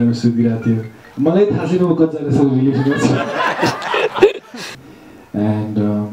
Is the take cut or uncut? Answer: cut